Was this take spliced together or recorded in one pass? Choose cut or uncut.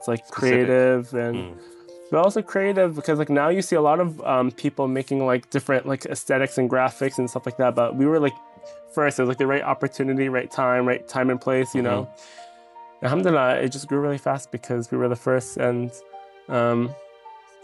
uncut